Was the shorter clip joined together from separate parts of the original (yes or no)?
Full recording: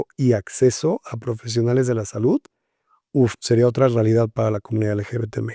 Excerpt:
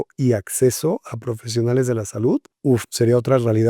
yes